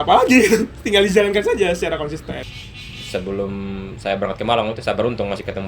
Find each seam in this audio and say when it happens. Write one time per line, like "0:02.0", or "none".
0:02.6